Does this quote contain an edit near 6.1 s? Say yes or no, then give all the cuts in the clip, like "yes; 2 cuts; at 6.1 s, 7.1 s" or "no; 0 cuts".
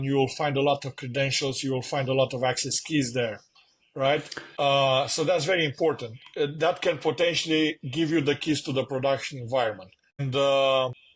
no; 2 cuts; at 4.4 s, 10.2 s